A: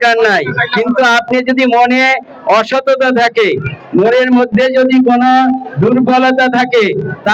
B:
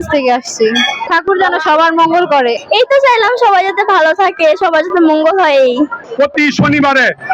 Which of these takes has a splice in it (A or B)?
B